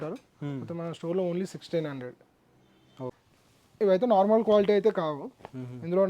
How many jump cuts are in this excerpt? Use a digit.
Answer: 1